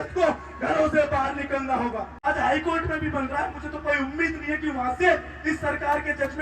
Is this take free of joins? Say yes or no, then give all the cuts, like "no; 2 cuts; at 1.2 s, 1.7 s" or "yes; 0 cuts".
no; 1 cut; at 2.1 s